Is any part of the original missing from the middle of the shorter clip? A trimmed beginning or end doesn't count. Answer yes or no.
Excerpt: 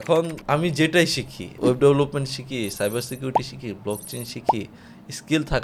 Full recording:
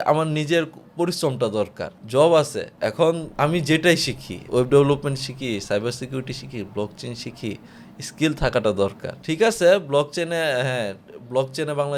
no